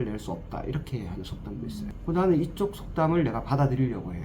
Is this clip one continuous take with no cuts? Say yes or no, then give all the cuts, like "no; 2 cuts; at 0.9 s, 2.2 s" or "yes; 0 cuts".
no; 1 cut; at 1.9 s